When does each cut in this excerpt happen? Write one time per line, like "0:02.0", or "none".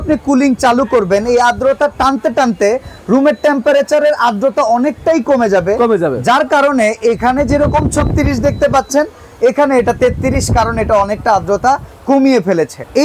none